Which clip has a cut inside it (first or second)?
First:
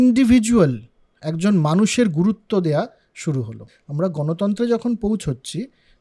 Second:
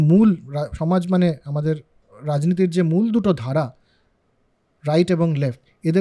first